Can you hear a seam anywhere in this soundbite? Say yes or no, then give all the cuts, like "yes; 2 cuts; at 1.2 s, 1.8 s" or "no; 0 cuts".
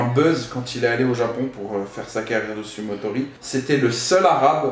yes; 1 cut; at 3.3 s